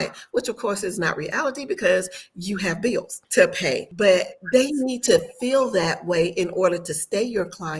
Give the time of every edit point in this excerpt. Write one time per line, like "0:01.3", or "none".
0:03.2
0:03.9

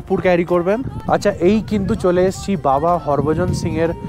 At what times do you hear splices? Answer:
0:00.9

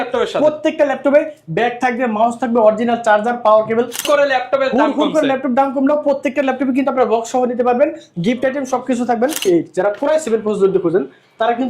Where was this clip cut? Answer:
0:04.0
0:09.4

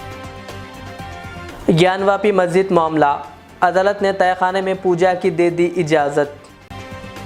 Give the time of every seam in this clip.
none

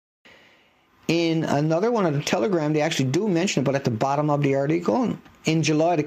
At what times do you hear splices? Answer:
none

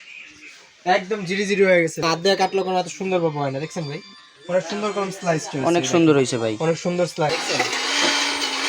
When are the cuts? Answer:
0:02.0
0:07.3

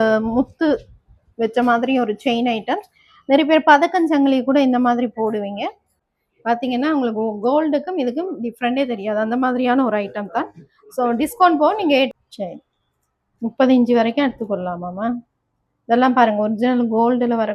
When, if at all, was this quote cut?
0:06.1
0:12.1

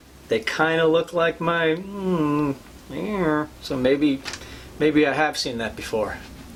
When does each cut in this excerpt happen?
none

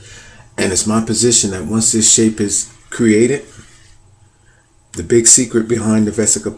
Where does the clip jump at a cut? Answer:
0:01.1

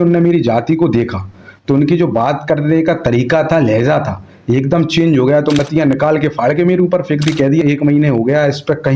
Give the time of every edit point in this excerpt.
0:05.6
0:07.6

